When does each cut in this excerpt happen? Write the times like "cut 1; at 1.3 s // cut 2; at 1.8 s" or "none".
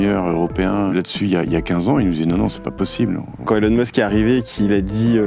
cut 1; at 0.9 s // cut 2; at 3.4 s